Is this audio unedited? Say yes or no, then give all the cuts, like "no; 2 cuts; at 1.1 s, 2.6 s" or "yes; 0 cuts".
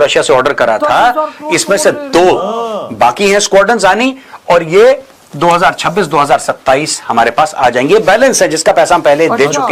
yes; 0 cuts